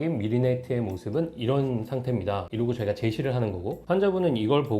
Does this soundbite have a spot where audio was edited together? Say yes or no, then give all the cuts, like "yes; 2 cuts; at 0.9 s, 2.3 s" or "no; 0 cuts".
yes; 1 cut; at 2.5 s